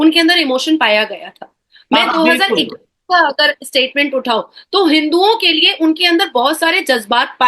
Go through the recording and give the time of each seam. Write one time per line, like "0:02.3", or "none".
none